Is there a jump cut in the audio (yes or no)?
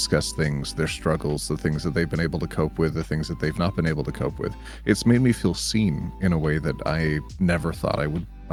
no